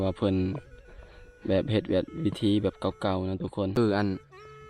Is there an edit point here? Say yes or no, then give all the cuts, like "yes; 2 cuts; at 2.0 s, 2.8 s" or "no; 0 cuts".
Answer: yes; 1 cut; at 3.7 s